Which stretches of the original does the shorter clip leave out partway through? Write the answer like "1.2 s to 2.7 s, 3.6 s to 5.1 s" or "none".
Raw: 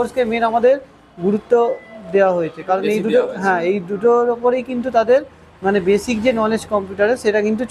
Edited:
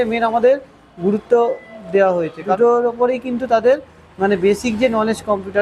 2.8 s to 4.0 s